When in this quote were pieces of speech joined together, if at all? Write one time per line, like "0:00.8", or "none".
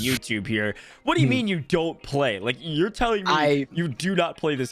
none